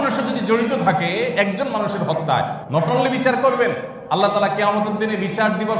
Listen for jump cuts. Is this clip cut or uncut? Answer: cut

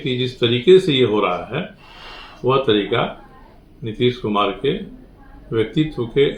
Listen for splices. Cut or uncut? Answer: uncut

